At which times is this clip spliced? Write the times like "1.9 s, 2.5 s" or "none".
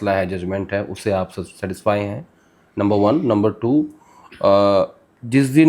none